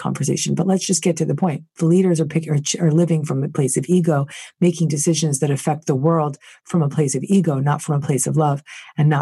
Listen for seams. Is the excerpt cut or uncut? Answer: uncut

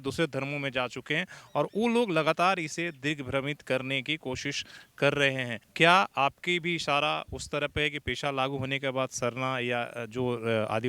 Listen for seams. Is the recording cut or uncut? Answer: cut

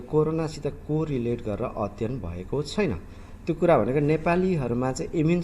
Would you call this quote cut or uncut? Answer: cut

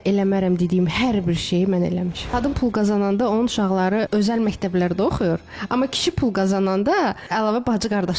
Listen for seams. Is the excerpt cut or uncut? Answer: cut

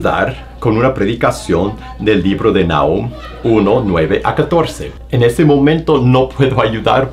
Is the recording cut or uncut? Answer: uncut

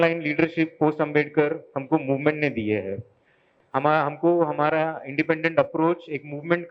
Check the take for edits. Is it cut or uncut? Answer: cut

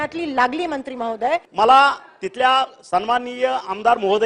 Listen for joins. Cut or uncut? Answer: cut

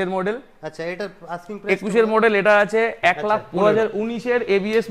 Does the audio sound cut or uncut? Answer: cut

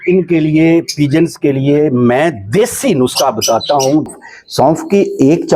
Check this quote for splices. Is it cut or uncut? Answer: cut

